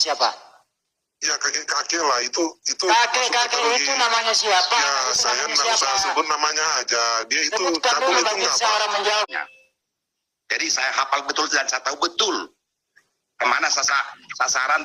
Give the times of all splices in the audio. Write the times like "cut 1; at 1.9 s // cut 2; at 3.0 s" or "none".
cut 1; at 9.3 s